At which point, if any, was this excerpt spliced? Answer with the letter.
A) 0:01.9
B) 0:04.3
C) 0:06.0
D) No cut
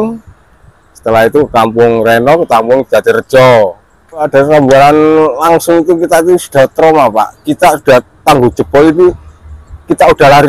B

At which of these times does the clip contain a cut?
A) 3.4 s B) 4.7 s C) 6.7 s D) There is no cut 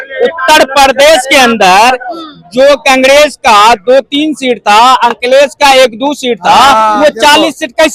D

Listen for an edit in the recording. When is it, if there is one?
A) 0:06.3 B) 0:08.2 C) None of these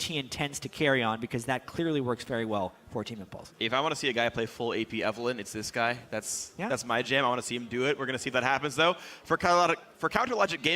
B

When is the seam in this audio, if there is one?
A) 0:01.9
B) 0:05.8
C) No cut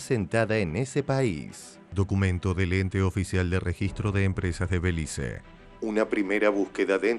A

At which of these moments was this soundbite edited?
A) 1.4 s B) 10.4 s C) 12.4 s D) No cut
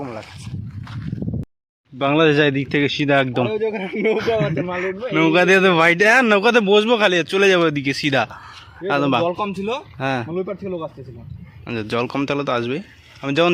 A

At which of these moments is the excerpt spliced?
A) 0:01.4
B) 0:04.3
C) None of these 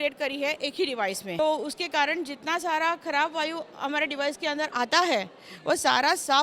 A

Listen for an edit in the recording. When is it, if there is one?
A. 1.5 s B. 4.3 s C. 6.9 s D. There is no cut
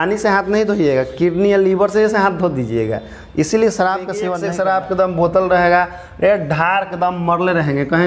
B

